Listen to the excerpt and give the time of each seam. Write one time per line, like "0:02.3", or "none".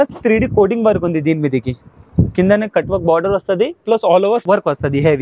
none